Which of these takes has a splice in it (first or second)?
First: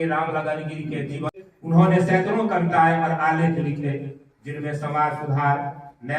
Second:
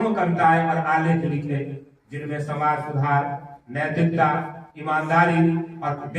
first